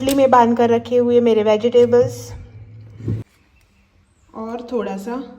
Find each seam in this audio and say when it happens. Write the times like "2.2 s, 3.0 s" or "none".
3.2 s